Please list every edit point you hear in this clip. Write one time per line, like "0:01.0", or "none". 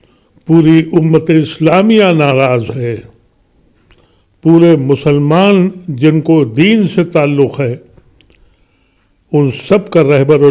none

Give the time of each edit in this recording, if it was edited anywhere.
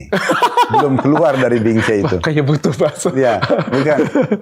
none

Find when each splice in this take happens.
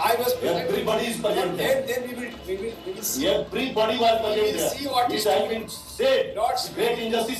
none

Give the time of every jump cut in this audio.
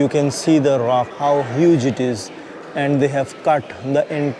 0:01.1

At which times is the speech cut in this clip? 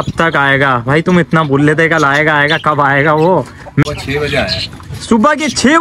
0:03.8

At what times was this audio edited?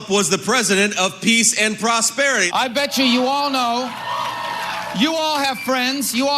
0:01.4

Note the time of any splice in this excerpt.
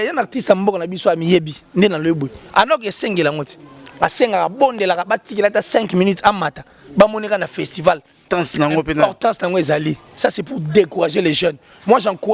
0:08.2

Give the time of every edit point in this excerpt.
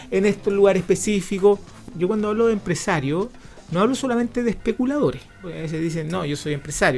0:01.8
0:05.5

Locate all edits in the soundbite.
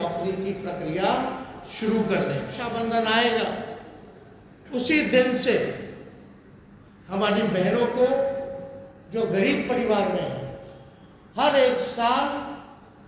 0:02.6

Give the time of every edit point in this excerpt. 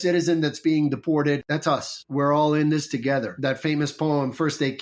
0:01.1
0:03.3

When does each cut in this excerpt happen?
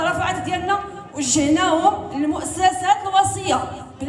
none

